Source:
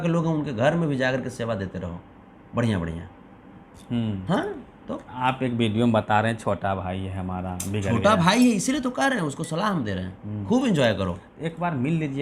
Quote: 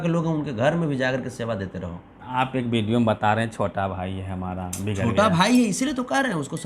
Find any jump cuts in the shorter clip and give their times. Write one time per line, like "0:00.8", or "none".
0:02.1